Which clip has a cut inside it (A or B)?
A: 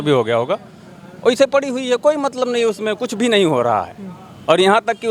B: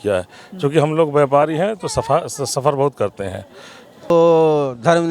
B